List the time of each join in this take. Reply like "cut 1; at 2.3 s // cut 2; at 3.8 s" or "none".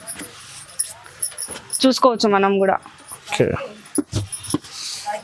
none